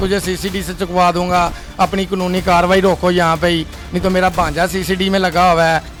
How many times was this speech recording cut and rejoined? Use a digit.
0